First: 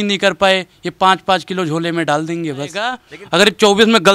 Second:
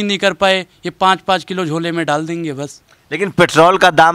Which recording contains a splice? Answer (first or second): first